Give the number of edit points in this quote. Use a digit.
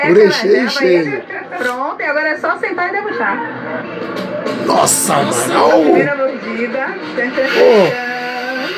0